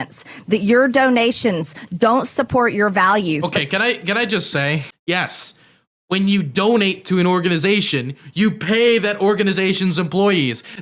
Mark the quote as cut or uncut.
cut